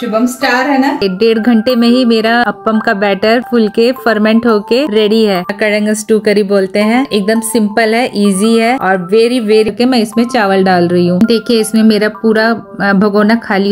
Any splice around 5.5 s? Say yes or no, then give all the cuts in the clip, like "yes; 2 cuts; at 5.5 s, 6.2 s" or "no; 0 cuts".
yes; 3 cuts; at 1.0 s, 5.5 s, 9.7 s